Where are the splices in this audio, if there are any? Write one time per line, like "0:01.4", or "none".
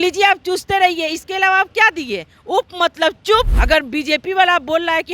0:03.6